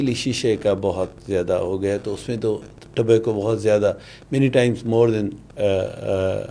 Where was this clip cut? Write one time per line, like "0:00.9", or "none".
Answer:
none